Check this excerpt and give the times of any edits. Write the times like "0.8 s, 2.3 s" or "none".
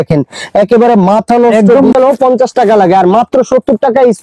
1.9 s